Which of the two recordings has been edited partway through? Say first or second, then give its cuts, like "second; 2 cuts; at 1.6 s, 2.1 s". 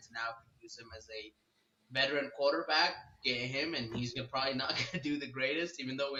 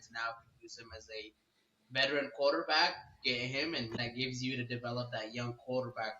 second; 1 cut; at 4.0 s